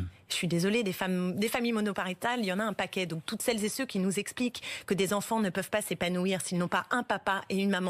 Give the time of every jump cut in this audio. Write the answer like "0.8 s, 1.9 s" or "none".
none